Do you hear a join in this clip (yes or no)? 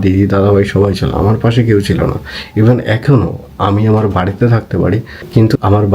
no